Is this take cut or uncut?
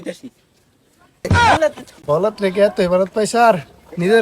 cut